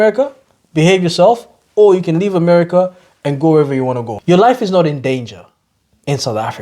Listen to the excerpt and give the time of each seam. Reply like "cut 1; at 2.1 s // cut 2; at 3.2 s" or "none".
cut 1; at 4.1 s